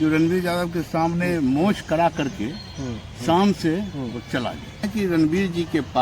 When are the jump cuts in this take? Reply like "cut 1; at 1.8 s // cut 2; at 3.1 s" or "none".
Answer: cut 1; at 4.9 s